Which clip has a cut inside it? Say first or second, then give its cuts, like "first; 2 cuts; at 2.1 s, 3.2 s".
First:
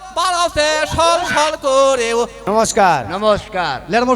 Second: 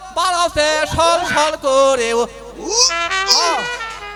first; 1 cut; at 2.4 s